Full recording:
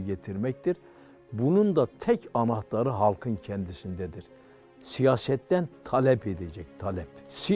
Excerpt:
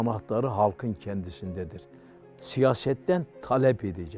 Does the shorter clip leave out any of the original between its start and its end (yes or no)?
no